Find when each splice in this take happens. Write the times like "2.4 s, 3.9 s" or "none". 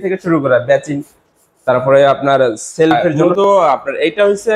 3.2 s